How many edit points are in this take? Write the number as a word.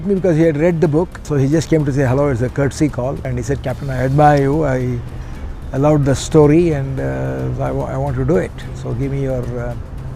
two